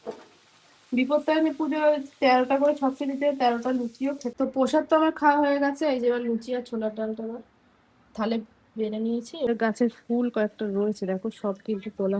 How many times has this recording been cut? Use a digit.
2